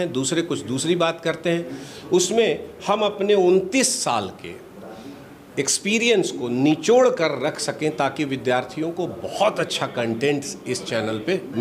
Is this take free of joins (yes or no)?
yes